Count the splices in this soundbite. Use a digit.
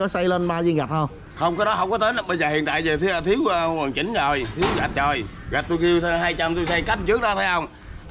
0